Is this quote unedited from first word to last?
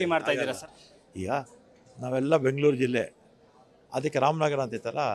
yes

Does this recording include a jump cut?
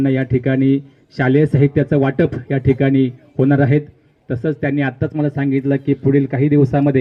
no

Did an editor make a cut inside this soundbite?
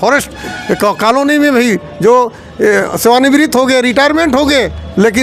no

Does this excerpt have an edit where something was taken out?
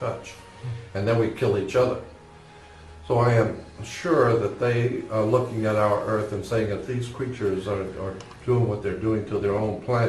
yes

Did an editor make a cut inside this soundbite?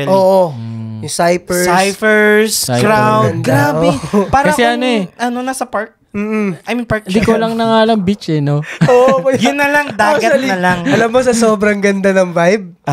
no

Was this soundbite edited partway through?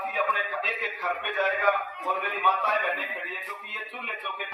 no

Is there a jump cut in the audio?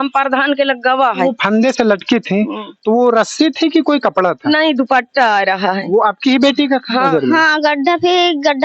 yes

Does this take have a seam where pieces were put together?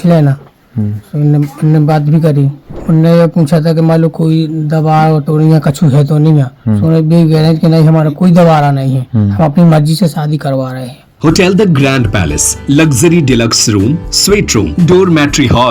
yes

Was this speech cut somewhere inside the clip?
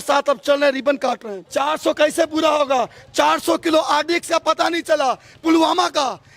yes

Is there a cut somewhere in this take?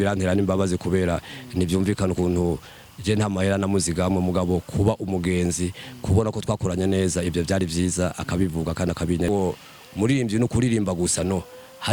yes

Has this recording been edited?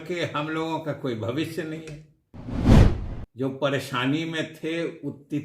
yes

